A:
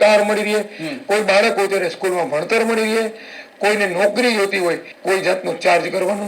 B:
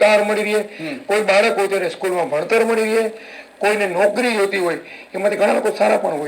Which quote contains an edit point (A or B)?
A